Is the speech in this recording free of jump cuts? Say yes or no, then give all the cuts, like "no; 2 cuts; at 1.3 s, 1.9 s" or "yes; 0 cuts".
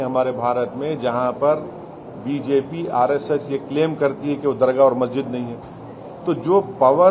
yes; 0 cuts